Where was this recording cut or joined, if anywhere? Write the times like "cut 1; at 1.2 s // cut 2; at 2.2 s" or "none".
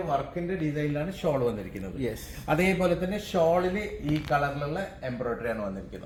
none